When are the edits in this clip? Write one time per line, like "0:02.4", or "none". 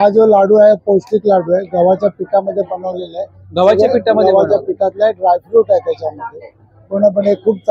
none